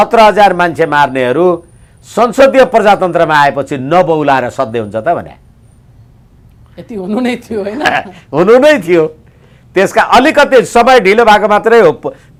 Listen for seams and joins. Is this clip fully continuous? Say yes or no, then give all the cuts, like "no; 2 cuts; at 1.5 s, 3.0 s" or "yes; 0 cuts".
yes; 0 cuts